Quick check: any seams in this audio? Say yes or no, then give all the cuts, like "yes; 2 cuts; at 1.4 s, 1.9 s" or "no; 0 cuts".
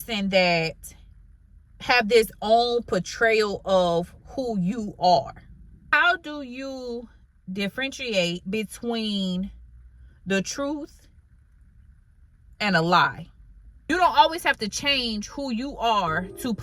yes; 2 cuts; at 5.8 s, 13.9 s